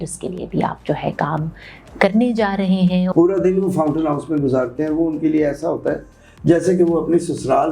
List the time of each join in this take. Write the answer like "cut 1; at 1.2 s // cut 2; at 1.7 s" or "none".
cut 1; at 3.1 s